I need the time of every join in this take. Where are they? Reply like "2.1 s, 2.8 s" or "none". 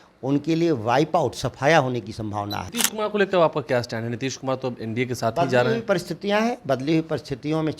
2.6 s